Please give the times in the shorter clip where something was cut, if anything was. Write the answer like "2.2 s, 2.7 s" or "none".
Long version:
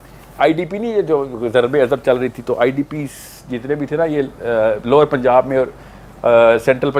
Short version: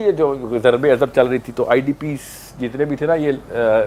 none